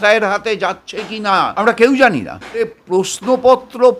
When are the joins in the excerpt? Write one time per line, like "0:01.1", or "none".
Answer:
0:01.5
0:02.8